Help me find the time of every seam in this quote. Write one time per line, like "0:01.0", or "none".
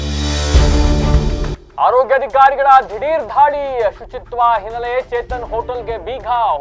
0:01.5